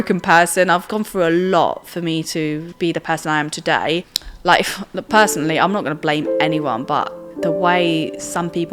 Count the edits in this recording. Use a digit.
3